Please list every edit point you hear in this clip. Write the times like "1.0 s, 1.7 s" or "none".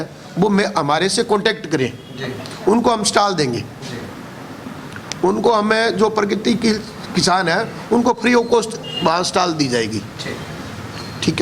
none